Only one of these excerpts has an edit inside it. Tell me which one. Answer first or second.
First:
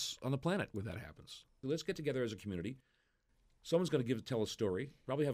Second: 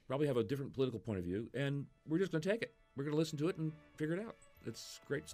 first